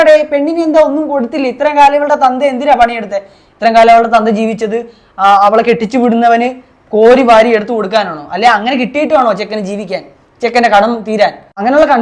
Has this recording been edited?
no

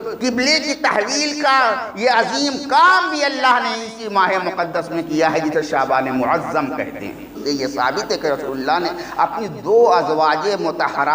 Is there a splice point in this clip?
yes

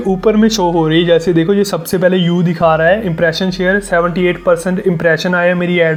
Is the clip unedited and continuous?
yes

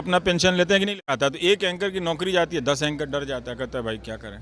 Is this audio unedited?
no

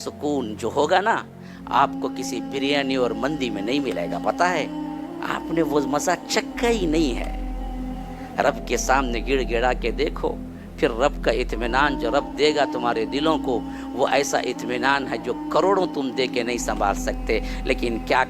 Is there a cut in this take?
no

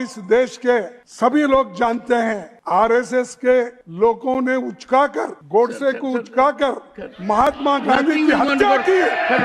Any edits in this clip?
yes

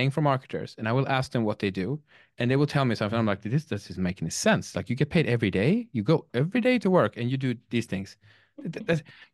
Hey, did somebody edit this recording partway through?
no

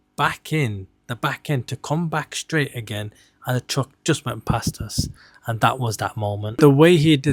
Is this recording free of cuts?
yes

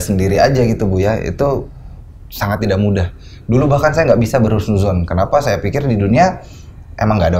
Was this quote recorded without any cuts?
yes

